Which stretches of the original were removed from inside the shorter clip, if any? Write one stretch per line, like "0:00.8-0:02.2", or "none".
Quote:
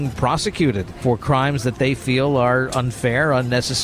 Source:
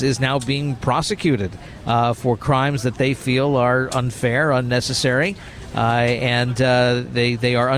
0:01.6-0:02.2

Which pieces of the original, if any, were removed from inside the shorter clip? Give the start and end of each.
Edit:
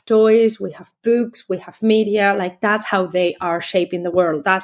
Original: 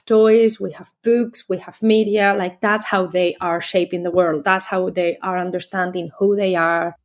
none

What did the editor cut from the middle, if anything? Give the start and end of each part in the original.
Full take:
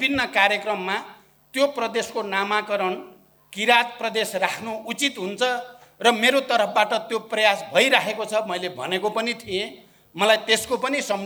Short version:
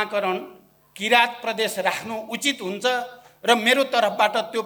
none

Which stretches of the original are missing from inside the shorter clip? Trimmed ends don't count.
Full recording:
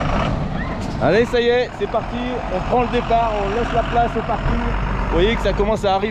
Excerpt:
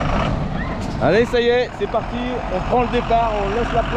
none

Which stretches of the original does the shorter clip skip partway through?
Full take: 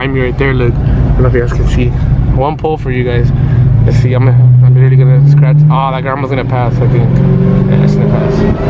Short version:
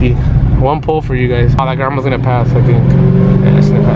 0:03.3-0:05.8

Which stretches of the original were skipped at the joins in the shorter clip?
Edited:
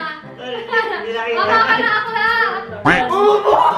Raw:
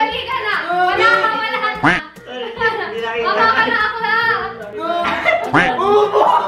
0:04.7-0:05.5

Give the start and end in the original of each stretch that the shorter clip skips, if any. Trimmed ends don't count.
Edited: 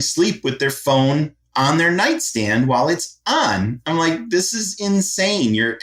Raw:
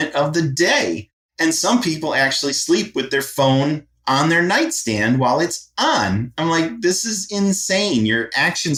none

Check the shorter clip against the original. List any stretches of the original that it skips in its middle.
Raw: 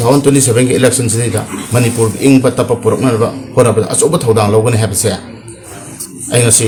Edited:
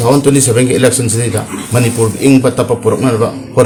none

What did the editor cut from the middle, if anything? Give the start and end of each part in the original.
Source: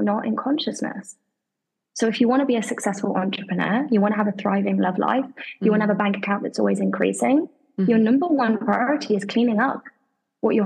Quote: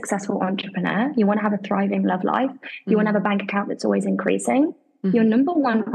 none

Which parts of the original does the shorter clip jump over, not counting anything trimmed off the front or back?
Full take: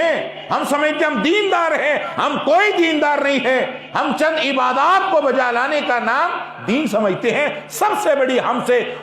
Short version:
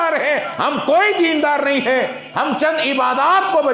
none

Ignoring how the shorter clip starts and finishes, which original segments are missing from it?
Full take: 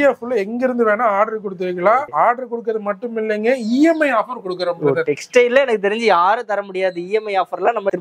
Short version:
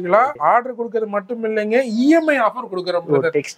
none

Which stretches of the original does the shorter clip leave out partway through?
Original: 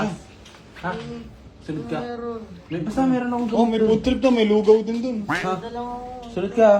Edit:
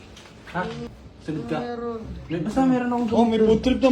0:01.3-0:01.4

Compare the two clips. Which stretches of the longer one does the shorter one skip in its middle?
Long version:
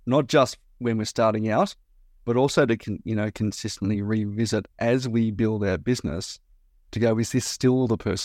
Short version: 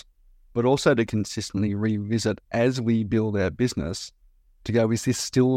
0:02.8-0:03.4

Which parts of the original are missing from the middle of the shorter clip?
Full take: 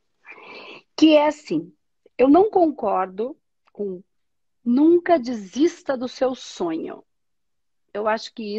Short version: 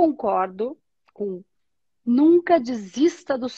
none

